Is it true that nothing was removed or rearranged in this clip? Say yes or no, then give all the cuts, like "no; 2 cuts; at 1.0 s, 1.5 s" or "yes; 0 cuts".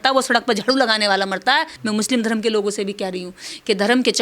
no; 1 cut; at 1.8 s